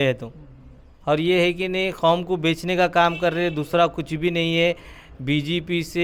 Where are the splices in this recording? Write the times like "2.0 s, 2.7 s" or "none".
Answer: none